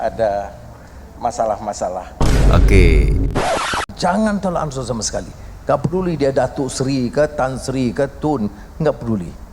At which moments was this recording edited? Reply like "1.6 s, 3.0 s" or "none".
3.6 s